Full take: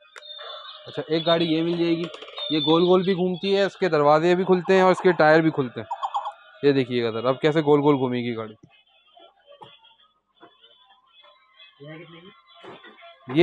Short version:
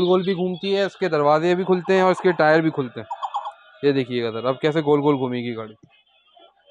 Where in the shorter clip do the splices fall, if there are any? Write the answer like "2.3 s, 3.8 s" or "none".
none